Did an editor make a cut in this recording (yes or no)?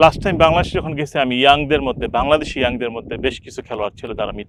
no